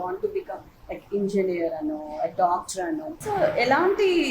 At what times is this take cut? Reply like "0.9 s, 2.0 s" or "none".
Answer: 3.1 s